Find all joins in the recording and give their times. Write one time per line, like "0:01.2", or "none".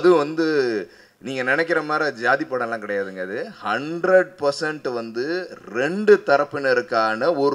none